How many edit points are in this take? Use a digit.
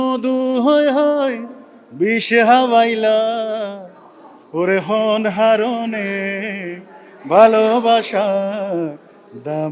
0